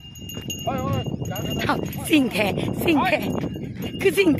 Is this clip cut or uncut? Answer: uncut